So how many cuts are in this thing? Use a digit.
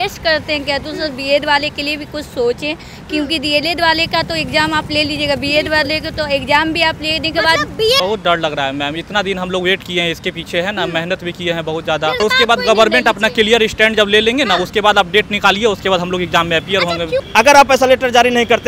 3